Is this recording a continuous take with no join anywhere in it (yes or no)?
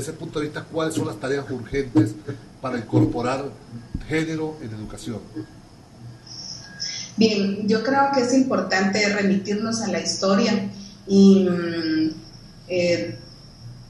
no